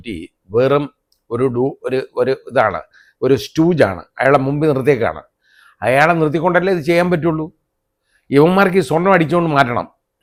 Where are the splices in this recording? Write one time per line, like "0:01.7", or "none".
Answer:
none